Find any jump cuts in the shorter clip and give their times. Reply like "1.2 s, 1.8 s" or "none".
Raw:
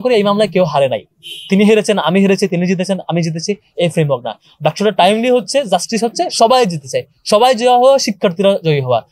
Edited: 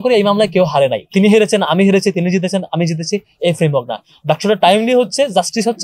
1.0 s